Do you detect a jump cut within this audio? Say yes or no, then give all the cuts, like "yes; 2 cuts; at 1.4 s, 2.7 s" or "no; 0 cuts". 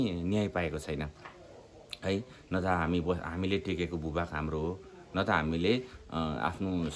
no; 0 cuts